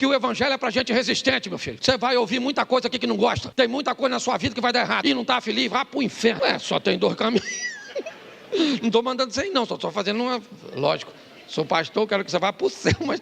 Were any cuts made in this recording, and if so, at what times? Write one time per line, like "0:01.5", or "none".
0:01.7
0:03.4
0:05.0
0:06.4